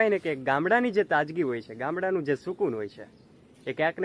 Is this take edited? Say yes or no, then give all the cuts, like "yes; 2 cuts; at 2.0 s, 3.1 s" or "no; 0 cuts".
no; 0 cuts